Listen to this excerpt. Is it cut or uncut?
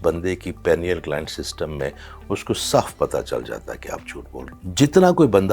cut